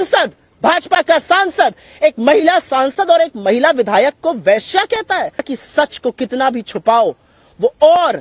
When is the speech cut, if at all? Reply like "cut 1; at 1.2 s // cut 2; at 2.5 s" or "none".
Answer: cut 1; at 5.5 s

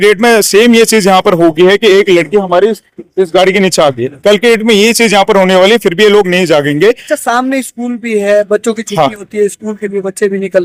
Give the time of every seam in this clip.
none

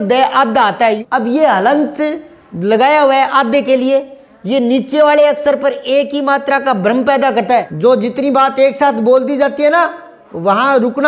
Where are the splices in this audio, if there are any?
cut 1; at 1.0 s // cut 2; at 7.7 s

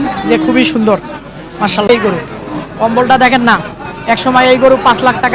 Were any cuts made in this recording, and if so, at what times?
cut 1; at 1.9 s

